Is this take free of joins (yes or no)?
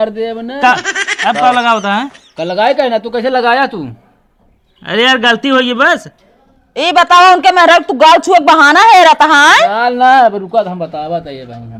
yes